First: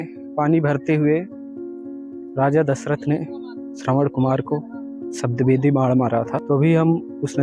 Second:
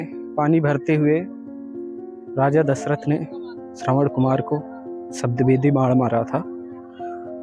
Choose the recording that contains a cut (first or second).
first